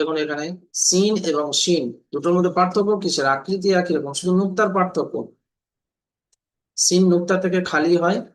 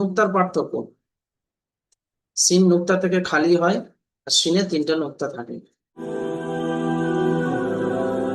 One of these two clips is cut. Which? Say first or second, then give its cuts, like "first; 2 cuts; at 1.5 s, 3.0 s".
second; 1 cut; at 6.0 s